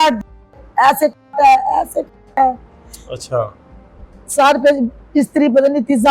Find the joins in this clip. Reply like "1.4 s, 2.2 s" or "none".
none